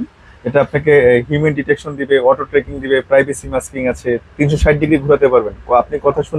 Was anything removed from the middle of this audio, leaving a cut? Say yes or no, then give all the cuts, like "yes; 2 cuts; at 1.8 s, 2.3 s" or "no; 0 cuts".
no; 0 cuts